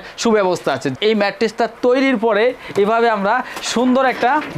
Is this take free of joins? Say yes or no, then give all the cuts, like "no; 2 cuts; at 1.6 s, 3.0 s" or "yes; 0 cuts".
no; 1 cut; at 0.9 s